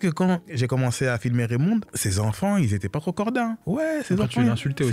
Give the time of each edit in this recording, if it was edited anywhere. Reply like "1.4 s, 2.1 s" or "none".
none

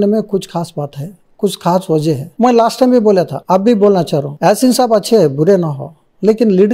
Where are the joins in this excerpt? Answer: none

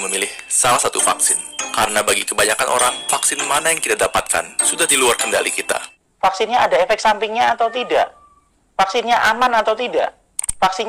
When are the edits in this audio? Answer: 5.9 s

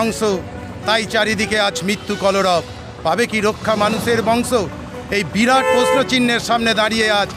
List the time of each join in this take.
none

